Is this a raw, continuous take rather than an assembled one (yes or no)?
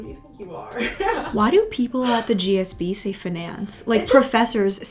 yes